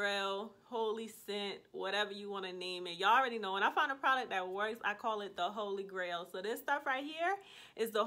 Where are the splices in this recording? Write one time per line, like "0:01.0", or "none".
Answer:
none